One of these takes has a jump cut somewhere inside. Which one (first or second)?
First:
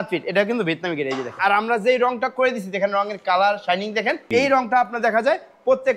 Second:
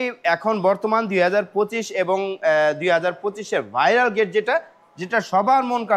first